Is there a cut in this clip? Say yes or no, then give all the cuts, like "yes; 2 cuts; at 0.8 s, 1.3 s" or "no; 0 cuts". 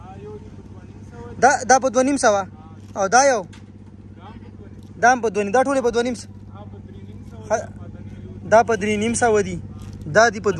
no; 0 cuts